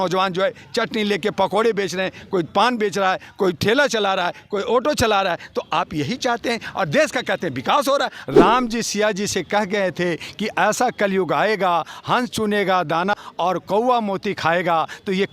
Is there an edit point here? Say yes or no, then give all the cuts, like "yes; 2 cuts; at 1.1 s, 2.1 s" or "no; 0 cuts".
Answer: yes; 2 cuts; at 8.2 s, 13.1 s